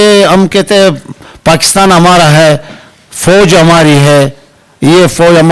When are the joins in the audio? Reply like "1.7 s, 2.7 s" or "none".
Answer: none